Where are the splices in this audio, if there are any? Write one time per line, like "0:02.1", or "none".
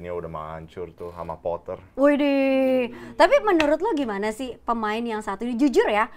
none